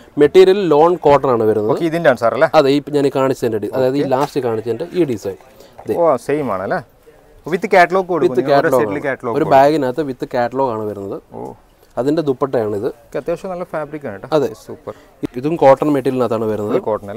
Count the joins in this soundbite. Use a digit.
1